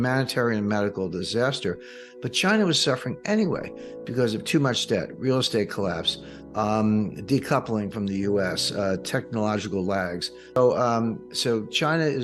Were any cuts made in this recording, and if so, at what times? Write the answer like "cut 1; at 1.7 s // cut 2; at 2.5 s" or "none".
cut 1; at 10.6 s